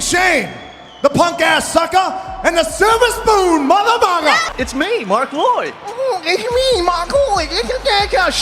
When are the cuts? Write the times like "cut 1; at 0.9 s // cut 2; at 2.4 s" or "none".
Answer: cut 1; at 4.4 s